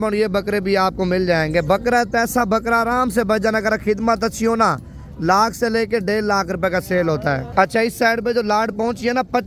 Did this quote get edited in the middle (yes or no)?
no